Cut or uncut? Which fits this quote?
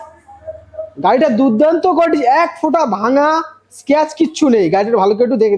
uncut